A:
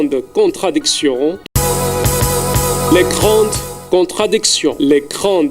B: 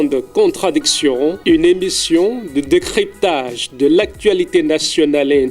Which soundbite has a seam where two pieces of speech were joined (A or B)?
B